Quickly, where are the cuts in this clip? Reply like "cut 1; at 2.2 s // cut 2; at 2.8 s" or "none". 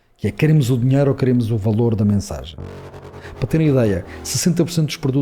cut 1; at 3.1 s